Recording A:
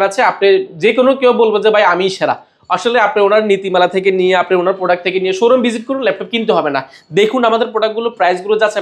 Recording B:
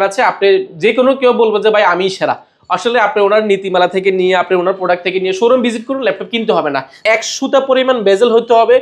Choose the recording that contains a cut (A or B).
B